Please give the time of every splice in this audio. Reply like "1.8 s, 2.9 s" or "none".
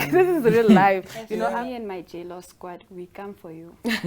1.5 s

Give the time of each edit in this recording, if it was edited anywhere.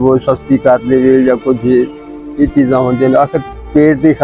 none

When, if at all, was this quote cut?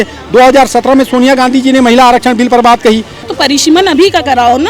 3.3 s

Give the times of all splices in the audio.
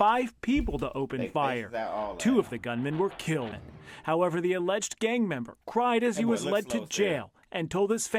3.6 s

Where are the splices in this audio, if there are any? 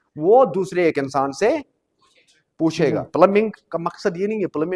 3.2 s

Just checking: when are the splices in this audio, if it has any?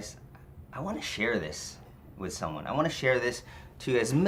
none

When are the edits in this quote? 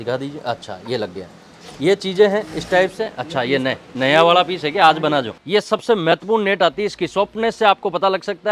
5.4 s

